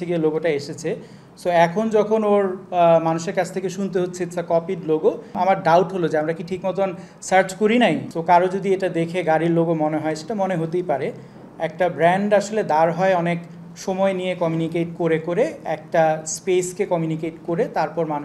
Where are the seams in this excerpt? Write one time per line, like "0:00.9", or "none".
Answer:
0:05.3
0:08.1